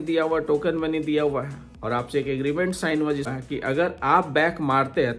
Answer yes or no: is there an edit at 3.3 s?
yes